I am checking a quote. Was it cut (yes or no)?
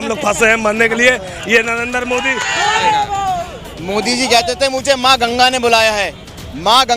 yes